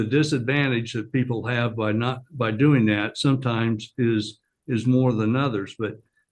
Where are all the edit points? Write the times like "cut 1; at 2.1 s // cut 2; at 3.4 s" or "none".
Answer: none